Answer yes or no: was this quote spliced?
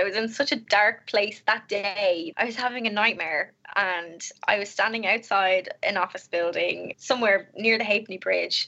yes